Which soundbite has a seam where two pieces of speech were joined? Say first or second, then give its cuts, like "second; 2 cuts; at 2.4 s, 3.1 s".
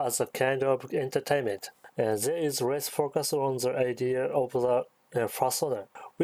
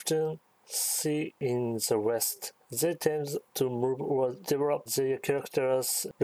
second; 4 cuts; at 1.4 s, 2.4 s, 3.4 s, 4.6 s